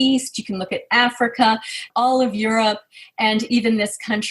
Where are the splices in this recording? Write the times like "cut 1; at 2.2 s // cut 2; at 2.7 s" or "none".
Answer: cut 1; at 1.9 s